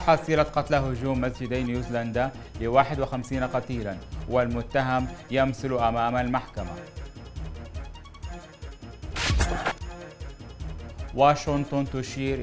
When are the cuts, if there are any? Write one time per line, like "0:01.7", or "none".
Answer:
0:06.7
0:09.1
0:09.8
0:11.1